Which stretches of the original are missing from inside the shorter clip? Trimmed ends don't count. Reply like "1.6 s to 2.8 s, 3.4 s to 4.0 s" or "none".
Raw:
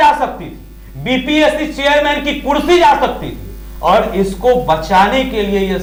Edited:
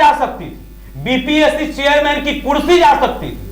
none